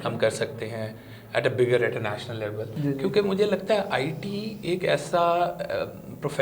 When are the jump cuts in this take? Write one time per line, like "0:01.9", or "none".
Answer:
0:02.7